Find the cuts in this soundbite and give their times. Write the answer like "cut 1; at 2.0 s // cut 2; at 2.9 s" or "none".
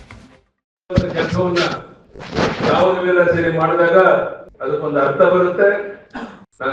cut 1; at 0.9 s